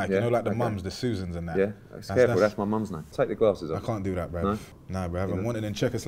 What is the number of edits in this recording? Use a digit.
2